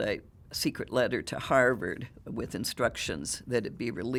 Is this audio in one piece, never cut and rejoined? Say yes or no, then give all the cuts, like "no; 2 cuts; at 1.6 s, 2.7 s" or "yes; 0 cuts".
yes; 0 cuts